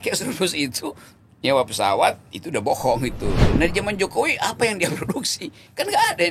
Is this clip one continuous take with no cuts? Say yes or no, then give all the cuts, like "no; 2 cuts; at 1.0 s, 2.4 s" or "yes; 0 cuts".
no; 1 cut; at 3.4 s